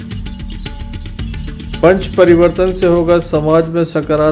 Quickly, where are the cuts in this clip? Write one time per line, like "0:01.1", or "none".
none